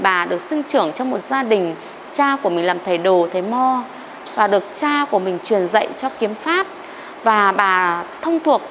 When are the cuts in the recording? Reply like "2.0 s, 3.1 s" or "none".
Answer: 4.1 s